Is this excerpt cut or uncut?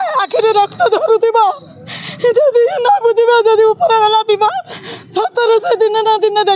uncut